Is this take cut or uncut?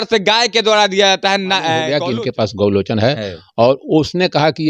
cut